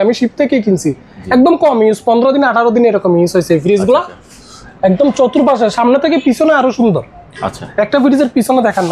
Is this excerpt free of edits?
yes; 0 cuts

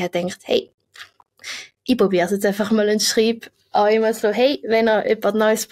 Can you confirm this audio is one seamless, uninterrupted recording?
yes; 0 cuts

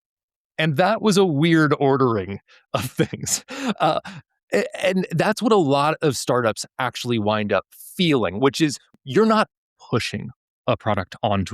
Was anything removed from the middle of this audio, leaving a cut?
yes; 1 cut; at 8.8 s

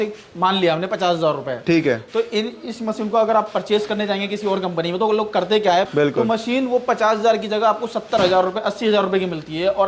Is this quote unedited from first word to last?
no; 1 cut; at 5.9 s

